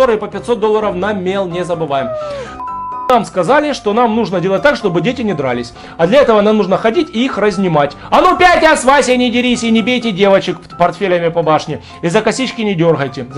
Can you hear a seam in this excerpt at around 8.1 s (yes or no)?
no